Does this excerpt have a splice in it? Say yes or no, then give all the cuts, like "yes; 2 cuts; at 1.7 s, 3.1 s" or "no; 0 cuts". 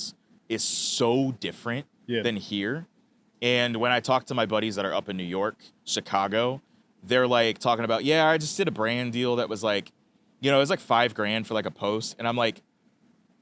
no; 0 cuts